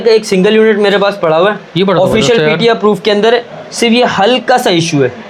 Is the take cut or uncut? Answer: uncut